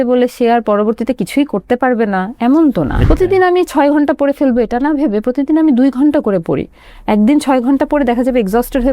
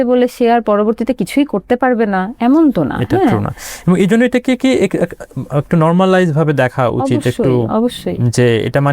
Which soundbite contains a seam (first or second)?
first